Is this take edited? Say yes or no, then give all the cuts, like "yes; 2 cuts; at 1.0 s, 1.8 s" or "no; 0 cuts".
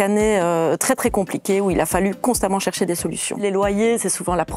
yes; 1 cut; at 3.4 s